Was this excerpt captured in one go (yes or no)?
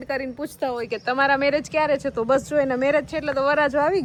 yes